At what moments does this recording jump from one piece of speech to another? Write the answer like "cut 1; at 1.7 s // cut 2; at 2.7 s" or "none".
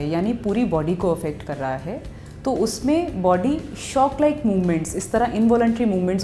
none